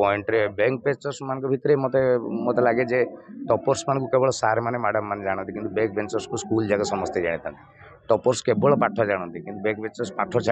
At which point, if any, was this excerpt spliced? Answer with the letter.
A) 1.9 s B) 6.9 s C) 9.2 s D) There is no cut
D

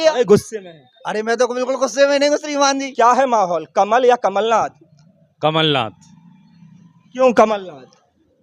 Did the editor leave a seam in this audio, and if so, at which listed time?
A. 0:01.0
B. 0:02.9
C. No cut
B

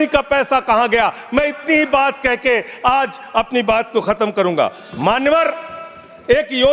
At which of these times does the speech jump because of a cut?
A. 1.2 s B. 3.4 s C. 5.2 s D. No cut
D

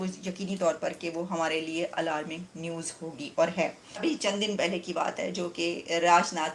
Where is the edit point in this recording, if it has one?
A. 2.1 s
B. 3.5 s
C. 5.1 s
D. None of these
D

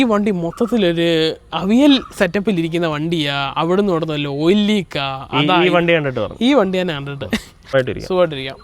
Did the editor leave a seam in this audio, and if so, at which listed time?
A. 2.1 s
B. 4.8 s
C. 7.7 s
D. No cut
C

